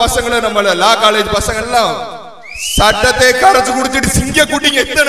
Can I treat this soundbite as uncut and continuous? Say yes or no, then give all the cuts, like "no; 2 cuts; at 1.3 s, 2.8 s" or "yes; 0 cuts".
yes; 0 cuts